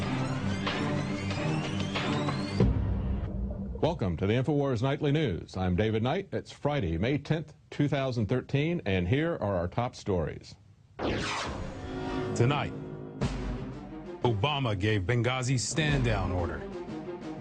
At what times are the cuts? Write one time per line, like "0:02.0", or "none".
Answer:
0:01.6